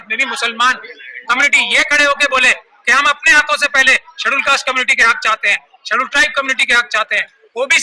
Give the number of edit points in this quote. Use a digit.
0